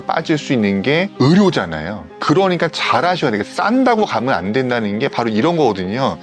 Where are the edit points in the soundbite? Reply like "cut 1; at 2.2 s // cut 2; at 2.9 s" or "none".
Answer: none